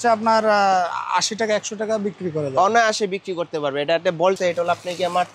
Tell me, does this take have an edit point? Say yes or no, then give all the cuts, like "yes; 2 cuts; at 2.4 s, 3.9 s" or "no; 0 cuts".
yes; 1 cut; at 4.4 s